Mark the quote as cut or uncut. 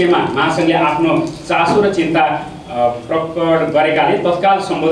uncut